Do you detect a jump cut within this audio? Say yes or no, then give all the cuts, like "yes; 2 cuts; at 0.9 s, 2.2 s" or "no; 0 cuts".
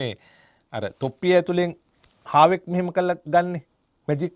no; 0 cuts